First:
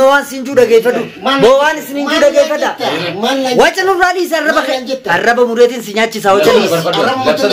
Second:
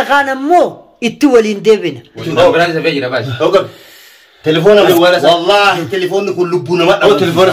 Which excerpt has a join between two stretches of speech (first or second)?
second